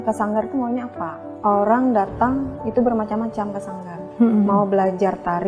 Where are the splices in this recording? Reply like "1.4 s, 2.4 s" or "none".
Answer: 1.2 s